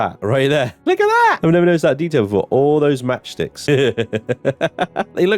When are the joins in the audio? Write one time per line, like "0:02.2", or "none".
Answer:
0:01.4
0:03.6